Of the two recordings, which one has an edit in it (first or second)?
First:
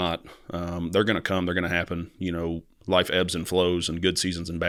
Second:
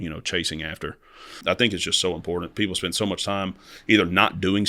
second